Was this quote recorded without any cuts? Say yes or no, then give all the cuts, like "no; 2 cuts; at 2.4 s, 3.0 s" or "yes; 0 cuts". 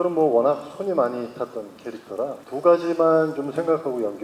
no; 1 cut; at 2.4 s